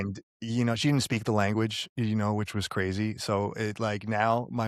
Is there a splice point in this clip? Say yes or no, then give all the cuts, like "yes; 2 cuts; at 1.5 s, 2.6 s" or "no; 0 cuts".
no; 0 cuts